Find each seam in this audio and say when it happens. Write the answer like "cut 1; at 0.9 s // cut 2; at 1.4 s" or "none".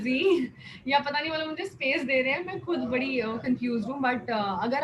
none